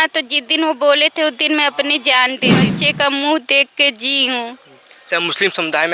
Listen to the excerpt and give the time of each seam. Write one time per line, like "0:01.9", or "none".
0:02.6